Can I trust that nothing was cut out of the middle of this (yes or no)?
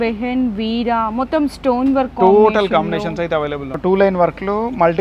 no